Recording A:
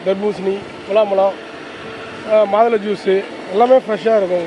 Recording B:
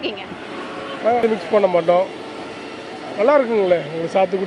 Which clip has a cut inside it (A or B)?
B